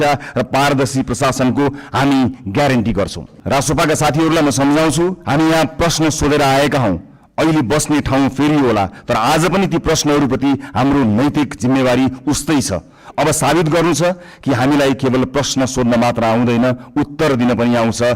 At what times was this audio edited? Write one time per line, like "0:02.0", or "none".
0:03.3